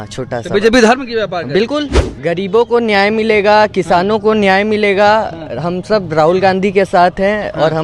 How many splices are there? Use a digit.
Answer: 1